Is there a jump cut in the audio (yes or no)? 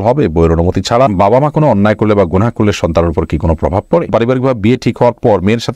yes